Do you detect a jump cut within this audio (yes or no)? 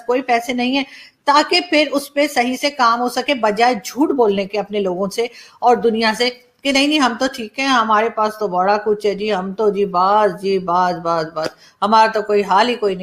no